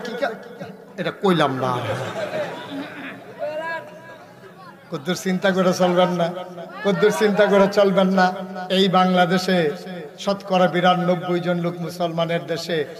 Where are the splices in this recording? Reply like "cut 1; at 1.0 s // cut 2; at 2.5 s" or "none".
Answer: none